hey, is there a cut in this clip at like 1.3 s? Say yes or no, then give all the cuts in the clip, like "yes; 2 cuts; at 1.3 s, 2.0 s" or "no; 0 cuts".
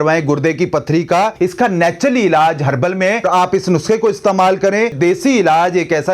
yes; 3 cuts; at 1.3 s, 3.3 s, 4.9 s